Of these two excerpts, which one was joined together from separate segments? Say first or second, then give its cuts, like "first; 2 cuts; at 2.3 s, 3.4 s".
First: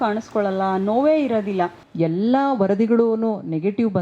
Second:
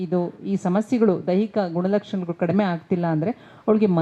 first; 1 cut; at 1.8 s